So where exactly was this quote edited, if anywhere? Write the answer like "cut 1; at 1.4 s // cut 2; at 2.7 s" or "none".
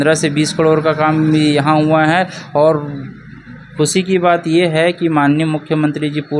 none